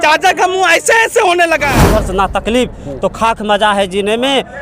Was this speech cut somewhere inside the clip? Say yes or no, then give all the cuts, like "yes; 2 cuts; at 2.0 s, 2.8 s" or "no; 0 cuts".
yes; 1 cut; at 1.9 s